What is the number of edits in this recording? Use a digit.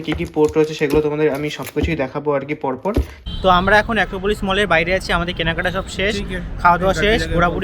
1